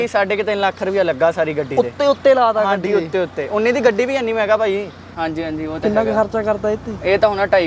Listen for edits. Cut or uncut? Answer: cut